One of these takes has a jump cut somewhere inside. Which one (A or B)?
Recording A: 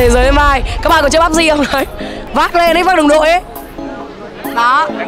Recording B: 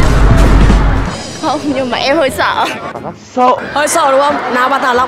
B